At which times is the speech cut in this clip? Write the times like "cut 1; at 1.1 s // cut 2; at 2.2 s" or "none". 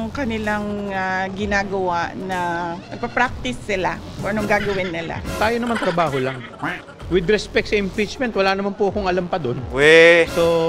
none